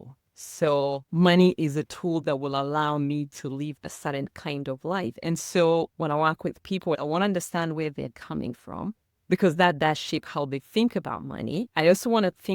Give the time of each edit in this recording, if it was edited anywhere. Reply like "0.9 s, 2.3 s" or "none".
1.0 s, 7.0 s, 11.7 s